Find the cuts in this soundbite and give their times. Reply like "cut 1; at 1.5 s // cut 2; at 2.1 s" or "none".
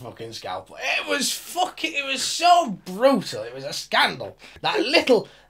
cut 1; at 4.6 s